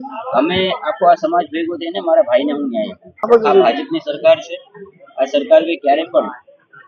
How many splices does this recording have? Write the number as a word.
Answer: one